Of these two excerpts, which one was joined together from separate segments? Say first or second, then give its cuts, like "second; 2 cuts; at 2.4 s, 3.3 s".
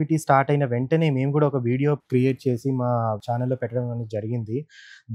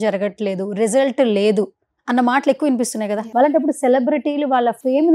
second; 1 cut; at 3.2 s